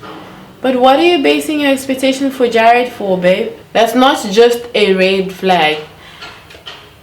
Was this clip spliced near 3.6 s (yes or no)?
yes